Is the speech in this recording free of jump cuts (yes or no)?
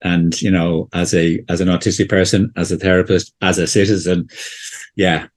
yes